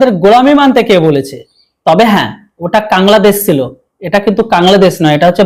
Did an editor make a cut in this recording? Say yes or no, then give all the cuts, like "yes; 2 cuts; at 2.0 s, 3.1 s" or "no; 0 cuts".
no; 0 cuts